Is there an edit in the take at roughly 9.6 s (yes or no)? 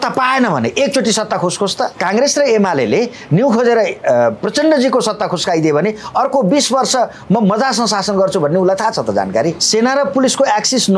yes